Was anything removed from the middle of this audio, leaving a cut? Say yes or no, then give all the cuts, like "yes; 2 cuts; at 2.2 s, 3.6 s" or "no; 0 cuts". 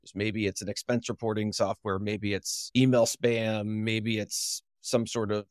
yes; 1 cut; at 2.6 s